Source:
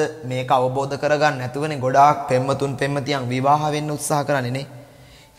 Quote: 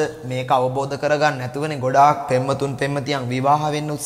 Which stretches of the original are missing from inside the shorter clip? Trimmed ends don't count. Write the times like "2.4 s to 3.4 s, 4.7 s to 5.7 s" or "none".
none